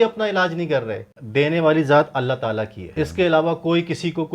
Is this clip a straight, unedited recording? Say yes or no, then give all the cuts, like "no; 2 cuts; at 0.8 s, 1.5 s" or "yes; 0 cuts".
no; 2 cuts; at 1.1 s, 2.8 s